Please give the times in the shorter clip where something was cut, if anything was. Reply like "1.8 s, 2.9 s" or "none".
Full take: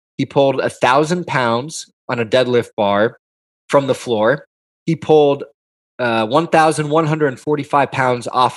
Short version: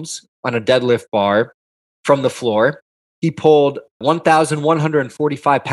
4.0 s